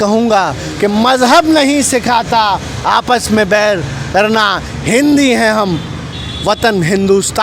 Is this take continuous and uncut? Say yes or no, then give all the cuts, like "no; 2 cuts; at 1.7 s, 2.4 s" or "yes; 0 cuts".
yes; 0 cuts